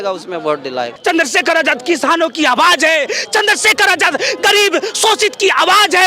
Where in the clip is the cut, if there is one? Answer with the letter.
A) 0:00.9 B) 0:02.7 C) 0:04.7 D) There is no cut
A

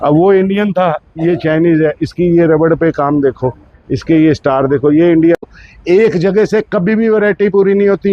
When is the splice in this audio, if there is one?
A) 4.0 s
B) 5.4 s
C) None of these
B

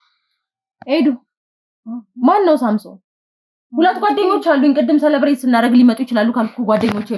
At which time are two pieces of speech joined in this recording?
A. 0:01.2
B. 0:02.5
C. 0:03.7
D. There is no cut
D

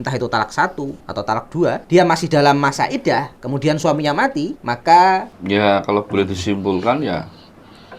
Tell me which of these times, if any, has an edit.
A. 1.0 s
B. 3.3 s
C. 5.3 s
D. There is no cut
C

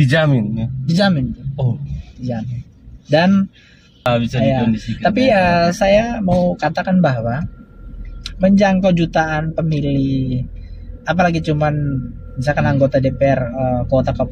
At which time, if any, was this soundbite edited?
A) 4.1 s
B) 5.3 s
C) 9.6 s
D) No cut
A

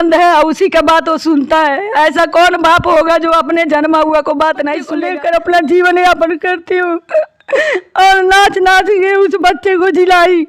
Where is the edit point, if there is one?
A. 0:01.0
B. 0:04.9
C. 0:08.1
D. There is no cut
B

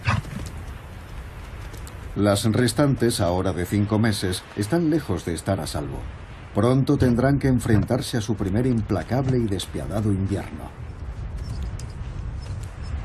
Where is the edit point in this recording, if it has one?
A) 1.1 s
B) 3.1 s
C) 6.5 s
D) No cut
A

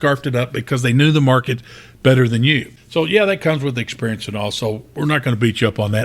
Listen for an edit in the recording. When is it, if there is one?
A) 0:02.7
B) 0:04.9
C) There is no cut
A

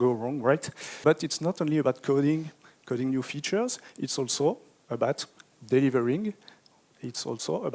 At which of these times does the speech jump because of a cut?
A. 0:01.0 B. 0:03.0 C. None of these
A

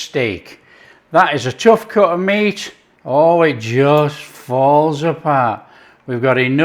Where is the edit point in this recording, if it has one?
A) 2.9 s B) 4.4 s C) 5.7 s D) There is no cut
A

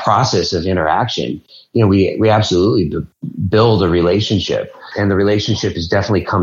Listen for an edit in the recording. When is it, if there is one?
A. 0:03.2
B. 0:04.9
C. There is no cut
B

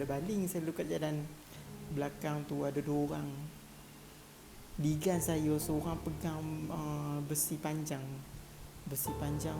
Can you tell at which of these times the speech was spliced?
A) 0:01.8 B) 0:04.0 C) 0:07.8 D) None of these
D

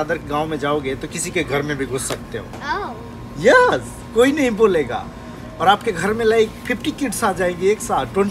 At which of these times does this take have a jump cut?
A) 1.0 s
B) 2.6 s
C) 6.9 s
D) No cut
B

